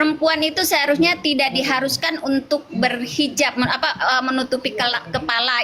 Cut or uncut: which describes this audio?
uncut